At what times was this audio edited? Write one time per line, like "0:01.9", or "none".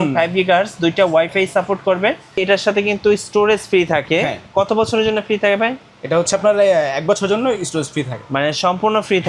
0:02.4

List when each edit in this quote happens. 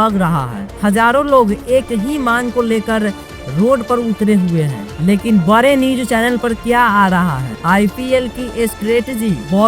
0:07.5

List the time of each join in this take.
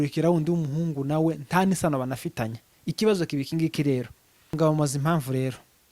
0:04.5

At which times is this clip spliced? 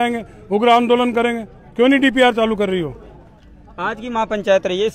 none

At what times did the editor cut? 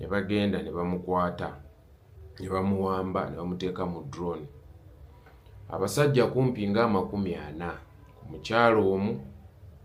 none

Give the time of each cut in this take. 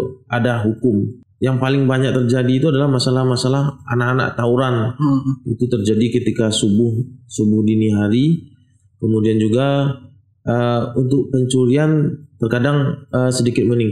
0:01.2

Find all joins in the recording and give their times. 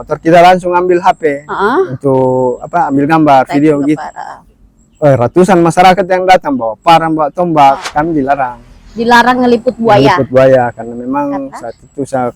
none

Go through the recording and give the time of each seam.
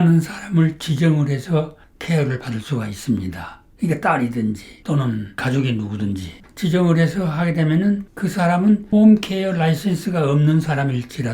0:06.3
0:08.1

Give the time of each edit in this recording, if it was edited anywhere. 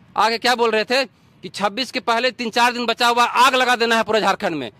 none

